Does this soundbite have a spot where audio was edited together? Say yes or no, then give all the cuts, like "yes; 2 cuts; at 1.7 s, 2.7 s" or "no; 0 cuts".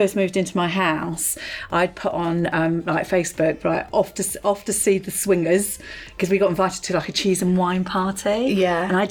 no; 0 cuts